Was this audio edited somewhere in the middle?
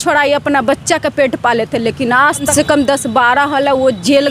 yes; 1 cut; at 2.5 s

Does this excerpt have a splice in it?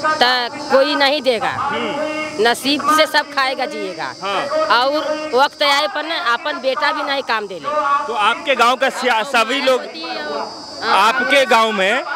no; 0 cuts

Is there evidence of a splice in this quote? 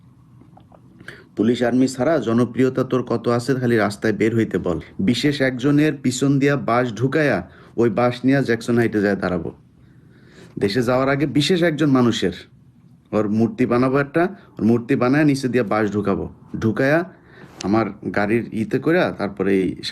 yes; 1 cut; at 4.9 s

